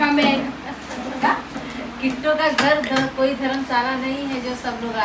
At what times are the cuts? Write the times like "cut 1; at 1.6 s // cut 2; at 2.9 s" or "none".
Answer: none